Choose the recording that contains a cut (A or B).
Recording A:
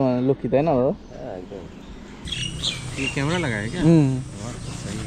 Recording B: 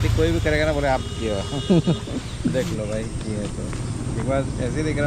A